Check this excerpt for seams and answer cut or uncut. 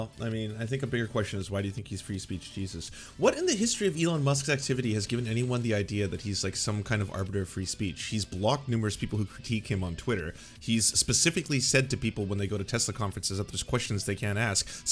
uncut